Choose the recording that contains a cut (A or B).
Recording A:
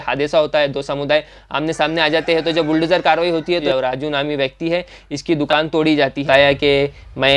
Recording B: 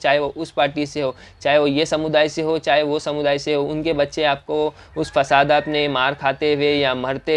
A